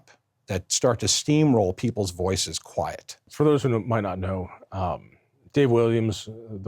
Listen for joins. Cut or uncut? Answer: cut